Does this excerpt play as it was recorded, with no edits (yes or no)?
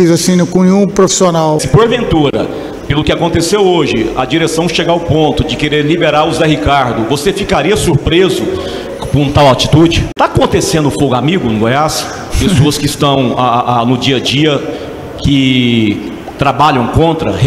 no